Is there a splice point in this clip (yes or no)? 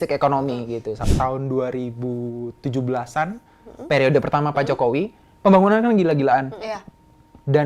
yes